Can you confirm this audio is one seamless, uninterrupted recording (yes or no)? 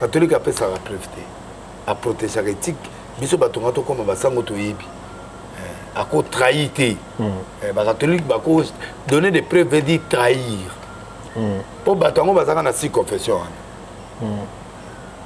yes